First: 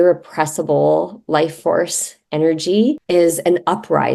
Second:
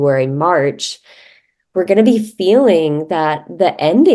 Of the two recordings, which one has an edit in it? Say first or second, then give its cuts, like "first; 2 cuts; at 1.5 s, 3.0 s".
first; 1 cut; at 3.0 s